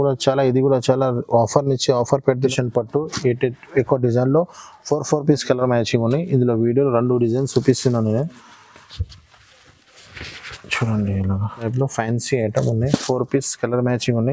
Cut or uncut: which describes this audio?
cut